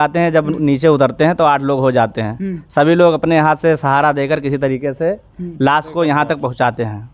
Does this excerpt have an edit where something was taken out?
no; 0 cuts

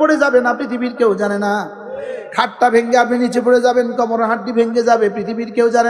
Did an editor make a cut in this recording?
no; 0 cuts

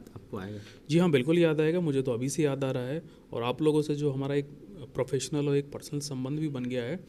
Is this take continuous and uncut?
yes; 0 cuts

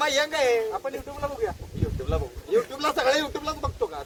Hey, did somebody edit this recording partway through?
no; 0 cuts

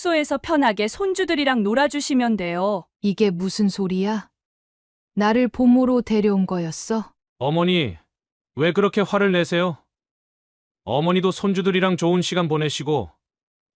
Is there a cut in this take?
yes; 2 cuts; at 2.9 s, 7.2 s

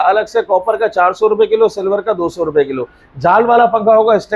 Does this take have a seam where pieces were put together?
no; 0 cuts

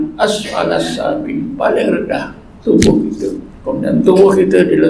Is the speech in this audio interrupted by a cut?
yes; 1 cut; at 3.5 s

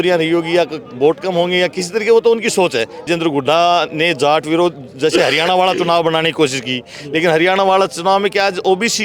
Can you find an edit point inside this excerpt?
yes; 1 cut; at 3.1 s

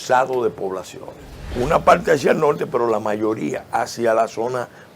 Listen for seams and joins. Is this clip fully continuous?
no; 1 cut; at 1.5 s

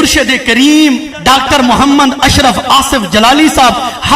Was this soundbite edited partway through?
yes; 1 cut; at 1.1 s

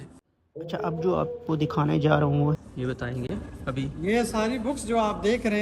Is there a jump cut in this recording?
yes; 1 cut; at 2.6 s

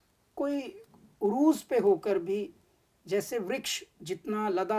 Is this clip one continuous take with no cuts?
yes; 0 cuts

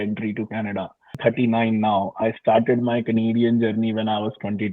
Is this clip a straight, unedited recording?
no; 1 cut; at 1.1 s

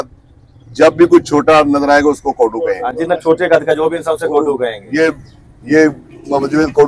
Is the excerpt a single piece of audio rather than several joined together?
yes; 0 cuts

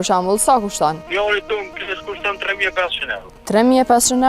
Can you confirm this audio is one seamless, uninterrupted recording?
no; 2 cuts; at 1.0 s, 3.3 s

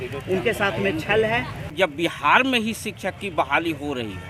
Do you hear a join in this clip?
yes; 1 cut; at 1.7 s

